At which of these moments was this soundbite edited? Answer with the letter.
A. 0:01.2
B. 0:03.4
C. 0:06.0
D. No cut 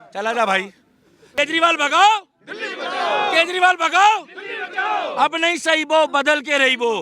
A